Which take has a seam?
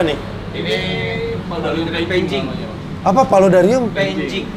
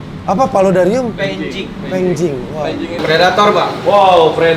second; 1 cut; at 3.0 s

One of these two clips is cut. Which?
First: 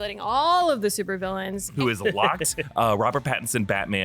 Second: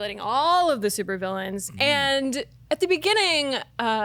first; 1 cut; at 1.6 s

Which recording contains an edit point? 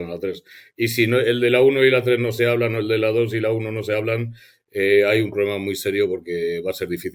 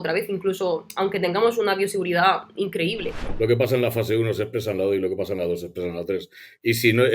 second; 1 cut; at 3.2 s

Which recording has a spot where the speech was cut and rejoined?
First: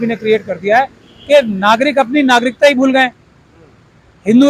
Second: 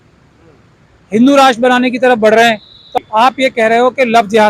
second; 1 cut; at 2.9 s

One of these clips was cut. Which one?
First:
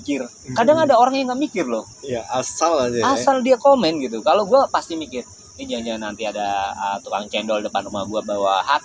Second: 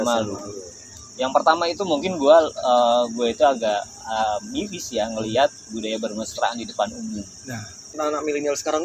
second; 1 cut; at 7.9 s

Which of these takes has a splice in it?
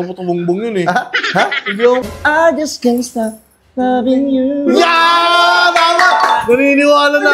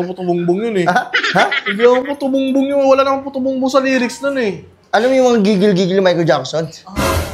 first; 1 cut; at 2.1 s

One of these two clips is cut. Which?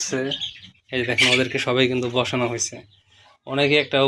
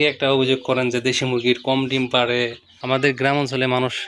second; 1 cut; at 2.7 s

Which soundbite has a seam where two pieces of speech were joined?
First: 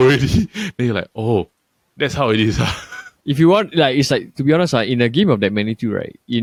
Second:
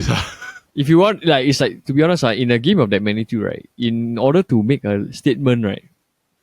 second; 1 cut; at 5.1 s

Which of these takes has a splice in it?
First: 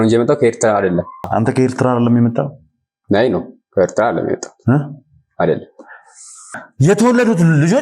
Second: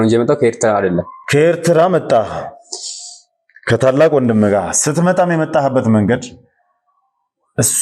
first; 2 cuts; at 1.2 s, 6.5 s

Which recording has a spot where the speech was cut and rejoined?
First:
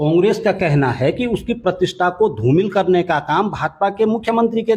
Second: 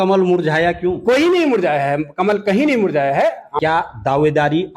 second; 1 cut; at 3.5 s

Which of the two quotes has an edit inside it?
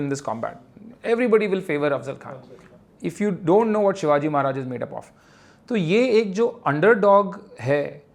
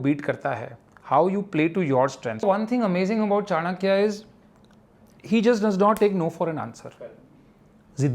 second; 1 cut; at 2.4 s

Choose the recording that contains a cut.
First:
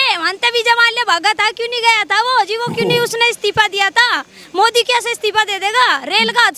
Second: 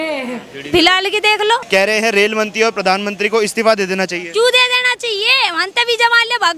second; 1 cut; at 1.6 s

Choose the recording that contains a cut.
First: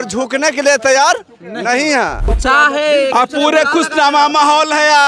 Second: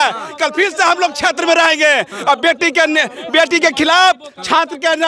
first; 1 cut; at 2.2 s

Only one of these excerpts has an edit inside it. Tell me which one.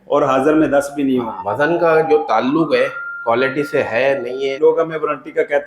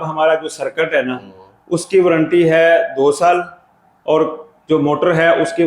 first; 2 cuts; at 1.4 s, 4.5 s

